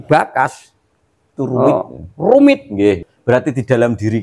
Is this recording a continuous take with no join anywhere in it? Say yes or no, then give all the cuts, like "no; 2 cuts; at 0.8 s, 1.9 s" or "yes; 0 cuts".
no; 1 cut; at 3.0 s